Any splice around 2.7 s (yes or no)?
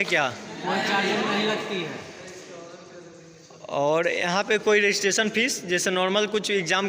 no